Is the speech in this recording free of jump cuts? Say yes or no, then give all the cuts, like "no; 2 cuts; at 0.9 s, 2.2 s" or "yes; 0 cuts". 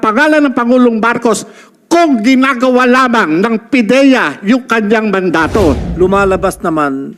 no; 1 cut; at 5.9 s